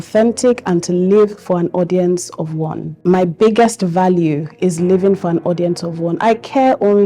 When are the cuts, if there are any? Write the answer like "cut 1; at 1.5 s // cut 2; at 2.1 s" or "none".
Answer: cut 1; at 2.9 s